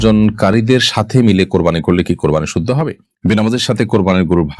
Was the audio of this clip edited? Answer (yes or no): yes